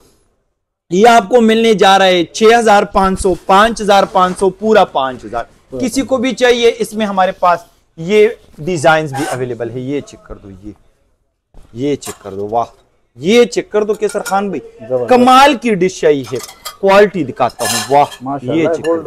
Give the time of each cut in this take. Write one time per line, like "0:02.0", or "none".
none

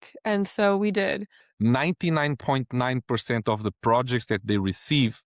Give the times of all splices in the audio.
0:01.3

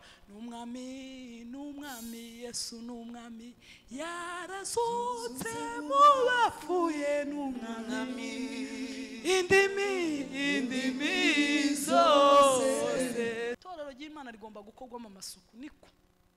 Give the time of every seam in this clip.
0:13.6

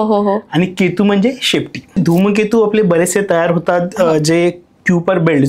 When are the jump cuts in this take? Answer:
0:02.0

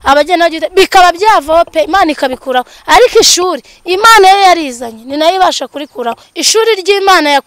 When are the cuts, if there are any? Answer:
0:06.3

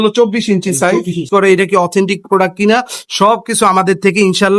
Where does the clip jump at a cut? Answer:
0:01.3

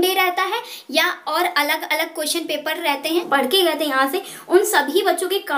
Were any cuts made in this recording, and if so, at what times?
0:02.9

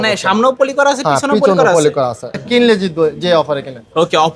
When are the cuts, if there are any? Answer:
0:02.4

